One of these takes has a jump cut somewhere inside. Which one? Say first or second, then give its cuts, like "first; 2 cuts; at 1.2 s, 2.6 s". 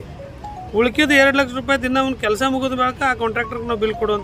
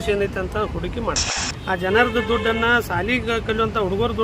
second; 1 cut; at 1.5 s